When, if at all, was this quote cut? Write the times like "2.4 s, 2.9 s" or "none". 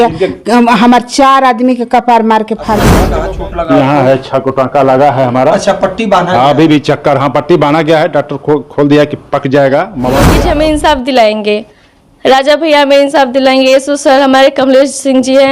3.0 s, 10.5 s